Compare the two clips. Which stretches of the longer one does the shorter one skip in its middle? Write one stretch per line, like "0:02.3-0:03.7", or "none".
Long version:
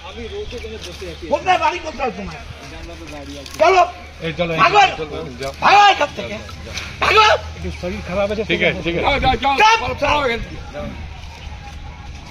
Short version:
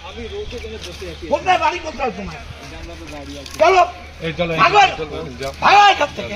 none